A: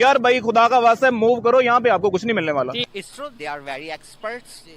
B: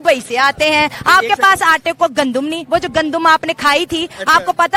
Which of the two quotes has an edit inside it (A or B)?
A